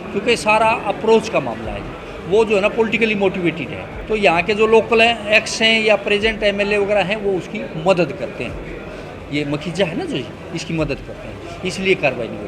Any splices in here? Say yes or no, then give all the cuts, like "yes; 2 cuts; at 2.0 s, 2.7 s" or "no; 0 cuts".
yes; 1 cut; at 3.9 s